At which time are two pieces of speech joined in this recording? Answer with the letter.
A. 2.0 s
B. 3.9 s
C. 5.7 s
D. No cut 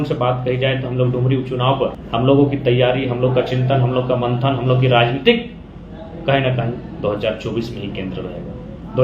A